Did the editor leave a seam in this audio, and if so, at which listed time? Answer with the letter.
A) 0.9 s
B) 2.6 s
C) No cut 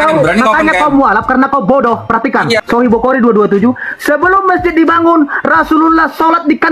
B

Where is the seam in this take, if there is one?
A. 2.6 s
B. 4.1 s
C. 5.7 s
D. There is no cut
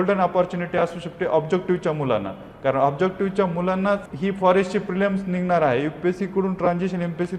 B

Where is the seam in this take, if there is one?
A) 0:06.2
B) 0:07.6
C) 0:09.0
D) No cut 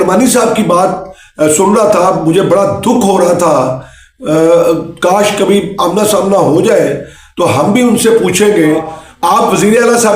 C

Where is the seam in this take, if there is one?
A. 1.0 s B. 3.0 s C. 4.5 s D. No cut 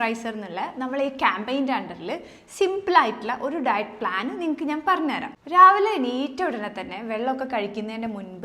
D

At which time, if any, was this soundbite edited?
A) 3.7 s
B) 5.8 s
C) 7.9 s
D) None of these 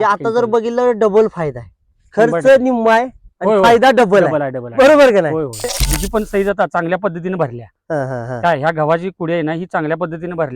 B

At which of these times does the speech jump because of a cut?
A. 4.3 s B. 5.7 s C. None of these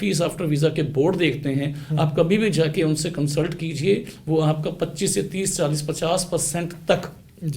C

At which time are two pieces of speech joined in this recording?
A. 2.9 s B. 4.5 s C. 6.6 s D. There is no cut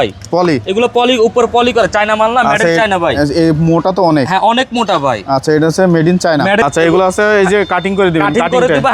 C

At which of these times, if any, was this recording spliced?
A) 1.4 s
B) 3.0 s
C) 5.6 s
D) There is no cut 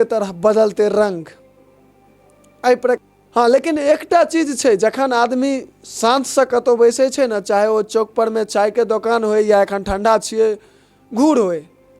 B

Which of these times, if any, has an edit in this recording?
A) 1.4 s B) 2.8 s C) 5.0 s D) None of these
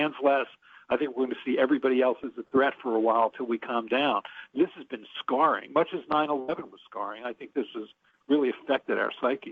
D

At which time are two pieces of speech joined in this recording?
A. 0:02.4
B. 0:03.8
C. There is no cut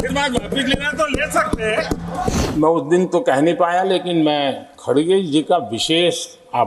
A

